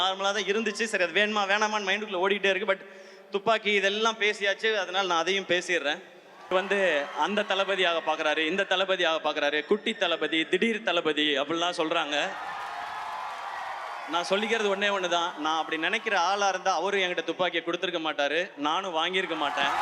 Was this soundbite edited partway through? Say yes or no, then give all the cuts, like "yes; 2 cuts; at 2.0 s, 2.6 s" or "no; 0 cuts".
yes; 1 cut; at 6.5 s